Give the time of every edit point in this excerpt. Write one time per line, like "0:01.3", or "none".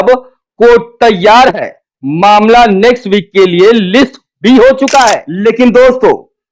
0:05.3